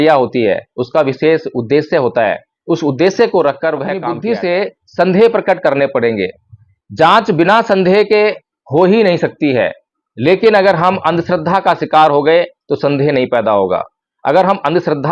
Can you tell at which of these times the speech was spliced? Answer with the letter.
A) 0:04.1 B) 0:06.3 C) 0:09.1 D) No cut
A